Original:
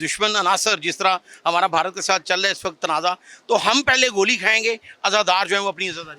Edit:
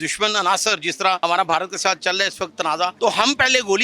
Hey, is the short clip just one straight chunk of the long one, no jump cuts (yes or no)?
no